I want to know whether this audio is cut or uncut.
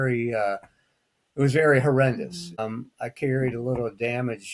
cut